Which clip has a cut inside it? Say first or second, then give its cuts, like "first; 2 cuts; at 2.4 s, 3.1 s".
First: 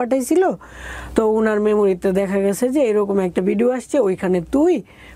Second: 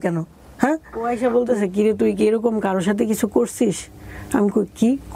second; 1 cut; at 1.1 s